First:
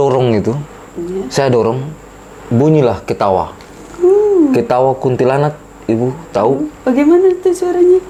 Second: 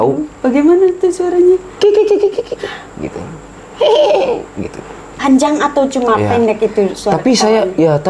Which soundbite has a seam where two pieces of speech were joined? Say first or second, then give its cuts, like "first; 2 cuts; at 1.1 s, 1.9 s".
second; 1 cut; at 4.8 s